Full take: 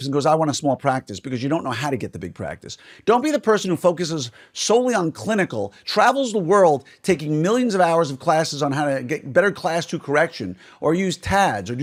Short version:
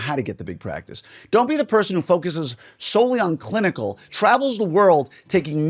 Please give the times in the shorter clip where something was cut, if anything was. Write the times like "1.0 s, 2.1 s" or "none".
none